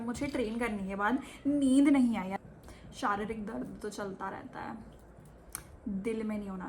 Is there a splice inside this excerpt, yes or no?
yes